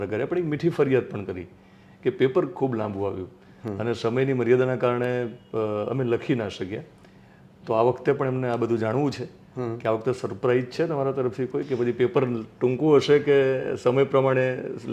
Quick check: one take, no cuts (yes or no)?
yes